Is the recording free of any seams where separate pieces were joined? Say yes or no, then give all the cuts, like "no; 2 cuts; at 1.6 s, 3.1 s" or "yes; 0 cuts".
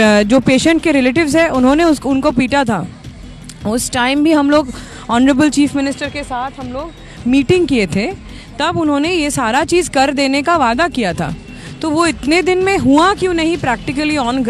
yes; 0 cuts